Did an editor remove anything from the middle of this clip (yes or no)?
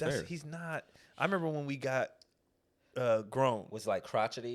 no